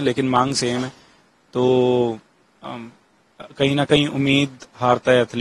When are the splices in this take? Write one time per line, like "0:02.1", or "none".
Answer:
none